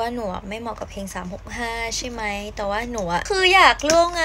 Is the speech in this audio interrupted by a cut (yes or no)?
yes